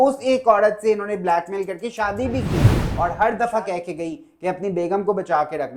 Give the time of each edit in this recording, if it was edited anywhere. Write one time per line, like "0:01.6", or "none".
0:02.5

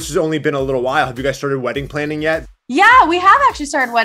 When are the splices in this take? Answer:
0:02.4

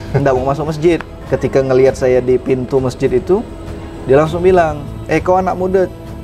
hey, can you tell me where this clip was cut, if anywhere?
0:01.2

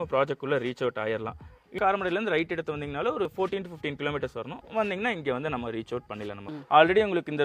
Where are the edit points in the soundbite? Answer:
0:01.7
0:03.3
0:06.5

